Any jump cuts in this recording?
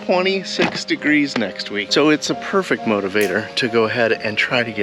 no; 0 cuts

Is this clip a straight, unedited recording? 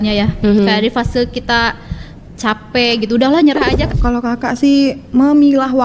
no; 1 cut; at 3.8 s

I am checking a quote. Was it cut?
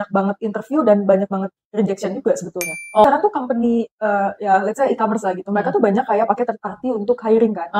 yes; 1 cut; at 3.0 s

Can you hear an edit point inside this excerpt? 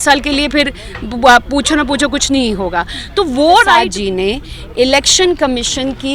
yes; 1 cut; at 3.8 s

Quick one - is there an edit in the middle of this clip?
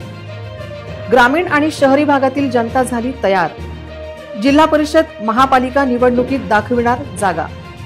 no; 0 cuts

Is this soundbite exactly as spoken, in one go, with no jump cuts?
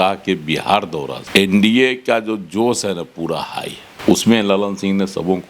no; 2 cuts; at 1.2 s, 3.8 s

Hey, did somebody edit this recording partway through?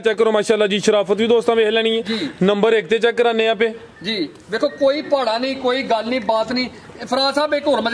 no; 0 cuts

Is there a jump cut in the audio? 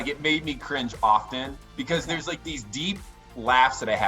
yes; 1 cut; at 1.6 s

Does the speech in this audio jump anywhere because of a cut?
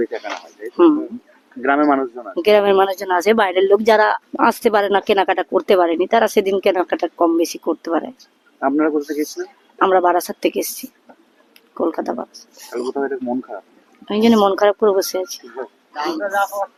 no; 0 cuts

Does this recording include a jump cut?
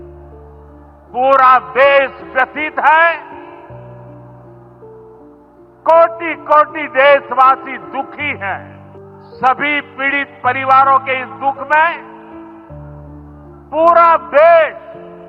yes; 1 cut; at 9.2 s

